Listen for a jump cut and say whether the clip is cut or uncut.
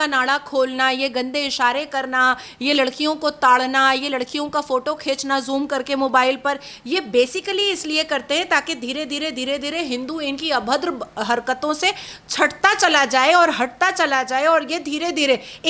uncut